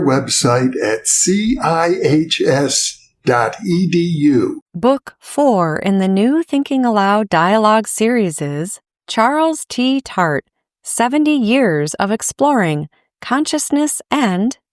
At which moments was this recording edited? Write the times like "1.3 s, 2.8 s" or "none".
4.6 s